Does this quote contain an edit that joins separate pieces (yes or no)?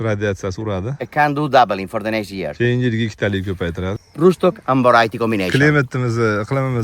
yes